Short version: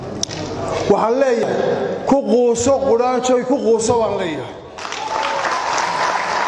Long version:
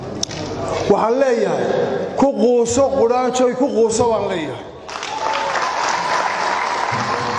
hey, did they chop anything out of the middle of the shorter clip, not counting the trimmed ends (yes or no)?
yes